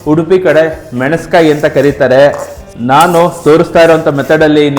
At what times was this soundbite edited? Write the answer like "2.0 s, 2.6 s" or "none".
2.6 s

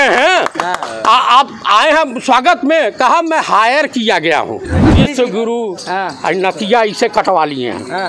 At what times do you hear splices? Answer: 4.9 s

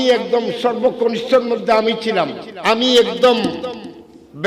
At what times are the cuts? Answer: 2.5 s

